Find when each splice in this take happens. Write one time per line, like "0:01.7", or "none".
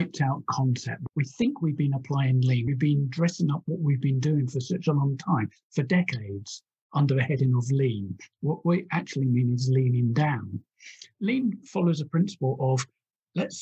0:00.9
0:02.7
0:11.0

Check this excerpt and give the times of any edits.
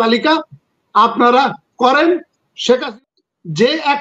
0:02.9

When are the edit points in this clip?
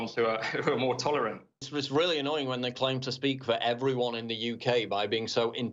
0:01.7

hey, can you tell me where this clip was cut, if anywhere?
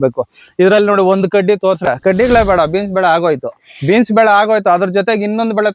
0:01.8

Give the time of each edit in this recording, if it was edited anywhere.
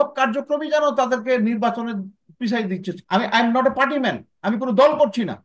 0:02.9

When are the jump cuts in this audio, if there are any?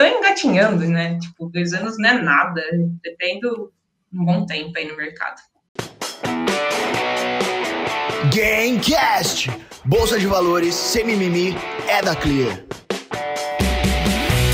0:05.7

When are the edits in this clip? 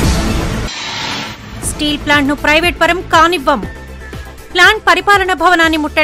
0:01.2

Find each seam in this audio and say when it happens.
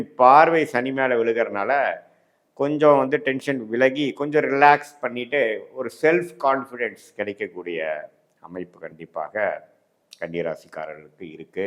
none

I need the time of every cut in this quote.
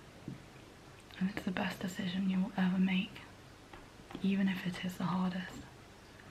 none

